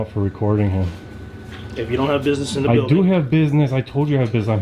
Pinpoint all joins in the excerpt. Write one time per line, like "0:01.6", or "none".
none